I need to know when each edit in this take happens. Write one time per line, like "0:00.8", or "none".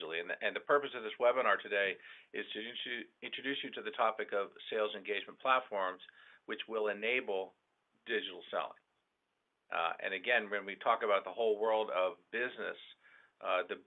none